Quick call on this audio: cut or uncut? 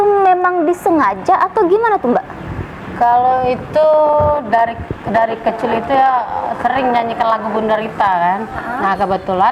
uncut